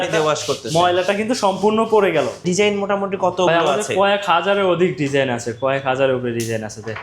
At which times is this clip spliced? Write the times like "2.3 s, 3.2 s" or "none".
2.5 s